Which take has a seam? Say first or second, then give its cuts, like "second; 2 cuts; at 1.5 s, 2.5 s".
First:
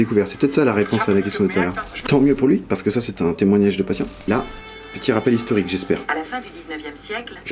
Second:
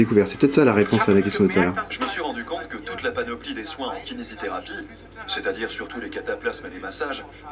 first; 2 cuts; at 2.0 s, 4.3 s